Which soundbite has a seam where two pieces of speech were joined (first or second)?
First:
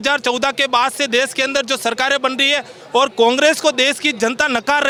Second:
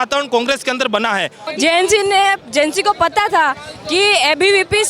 second